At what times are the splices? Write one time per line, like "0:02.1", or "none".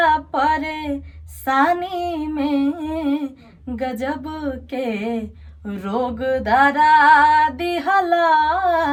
none